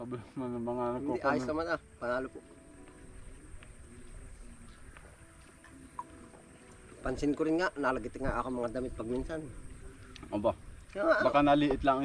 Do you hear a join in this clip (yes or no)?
no